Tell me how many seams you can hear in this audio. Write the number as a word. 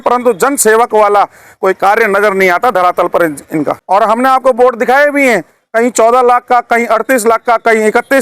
one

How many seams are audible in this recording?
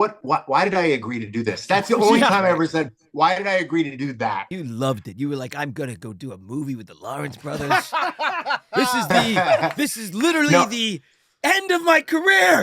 one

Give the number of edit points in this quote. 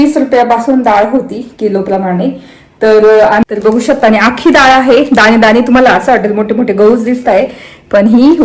one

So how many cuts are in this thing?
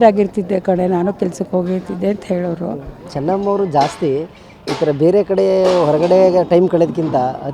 one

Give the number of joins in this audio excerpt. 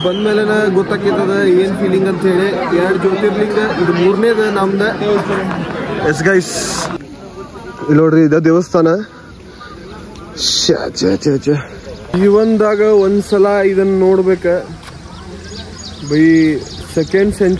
two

